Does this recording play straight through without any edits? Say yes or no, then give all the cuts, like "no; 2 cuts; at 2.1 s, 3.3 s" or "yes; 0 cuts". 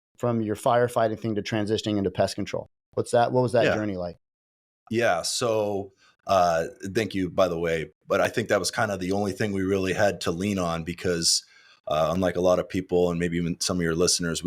yes; 0 cuts